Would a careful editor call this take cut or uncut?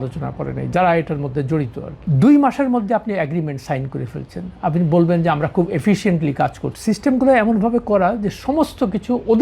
cut